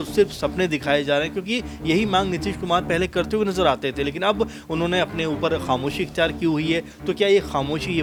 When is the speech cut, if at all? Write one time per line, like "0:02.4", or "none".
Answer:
none